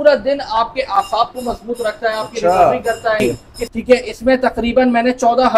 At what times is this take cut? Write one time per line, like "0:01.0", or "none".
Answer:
0:03.2